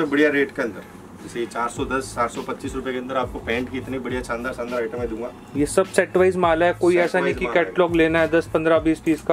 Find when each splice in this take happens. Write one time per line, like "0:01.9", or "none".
none